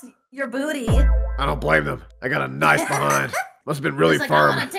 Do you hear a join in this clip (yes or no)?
yes